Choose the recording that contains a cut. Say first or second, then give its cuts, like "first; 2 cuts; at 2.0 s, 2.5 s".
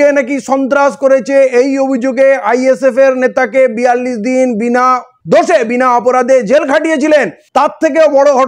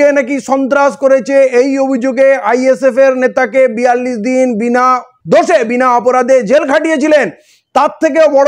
first; 1 cut; at 7.4 s